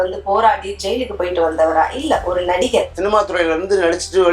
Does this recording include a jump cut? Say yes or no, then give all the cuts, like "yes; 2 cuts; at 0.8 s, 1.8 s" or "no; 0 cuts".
yes; 1 cut; at 2.9 s